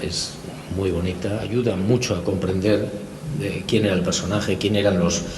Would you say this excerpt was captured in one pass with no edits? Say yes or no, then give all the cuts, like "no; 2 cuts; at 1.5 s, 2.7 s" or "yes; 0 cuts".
no; 1 cut; at 1.4 s